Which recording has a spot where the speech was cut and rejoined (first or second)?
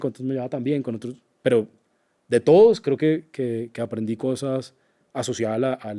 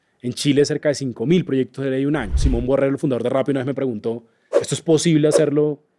second